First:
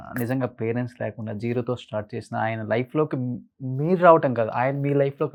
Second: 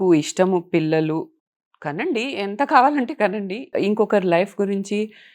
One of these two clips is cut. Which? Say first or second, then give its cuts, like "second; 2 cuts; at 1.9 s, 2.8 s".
second; 2 cuts; at 1.4 s, 3.7 s